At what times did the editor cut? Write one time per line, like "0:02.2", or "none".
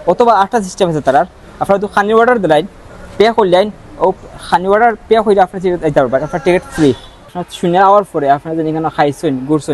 0:07.4